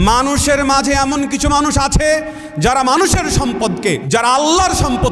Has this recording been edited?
yes; 1 cut; at 4.0 s

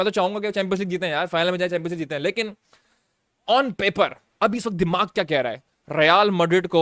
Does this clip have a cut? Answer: no; 0 cuts

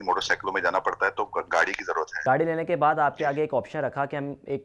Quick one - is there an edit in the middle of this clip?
yes; 1 cut; at 2.1 s

